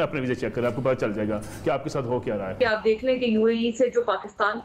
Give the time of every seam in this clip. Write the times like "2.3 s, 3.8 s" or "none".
2.5 s